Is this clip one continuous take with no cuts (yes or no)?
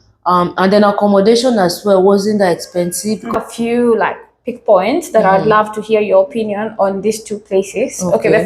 no